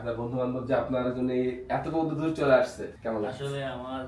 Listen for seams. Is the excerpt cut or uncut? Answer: uncut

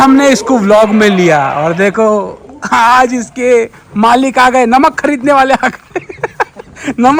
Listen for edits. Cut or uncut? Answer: uncut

